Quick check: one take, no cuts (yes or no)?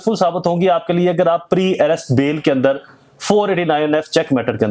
yes